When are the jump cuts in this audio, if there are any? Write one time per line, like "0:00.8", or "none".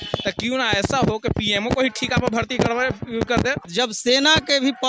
0:03.6

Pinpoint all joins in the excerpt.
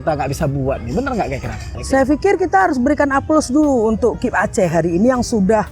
0:01.7

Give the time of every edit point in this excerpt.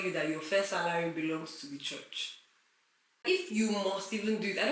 0:03.2

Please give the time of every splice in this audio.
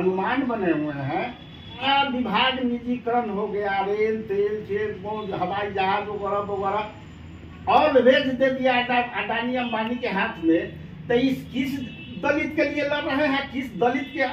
0:01.8

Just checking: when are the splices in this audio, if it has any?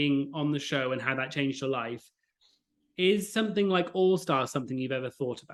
none

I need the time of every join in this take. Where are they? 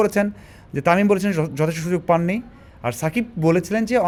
none

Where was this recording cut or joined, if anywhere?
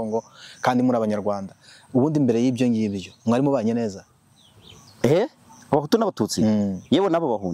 none

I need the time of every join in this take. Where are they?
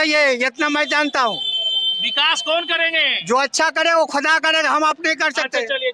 none

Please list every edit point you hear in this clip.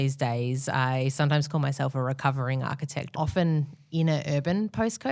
0:03.1

